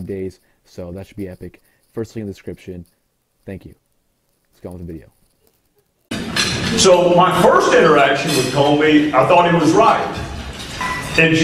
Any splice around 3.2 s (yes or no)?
no